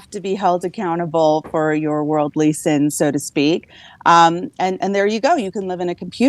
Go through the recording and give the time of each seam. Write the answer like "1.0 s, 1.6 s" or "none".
none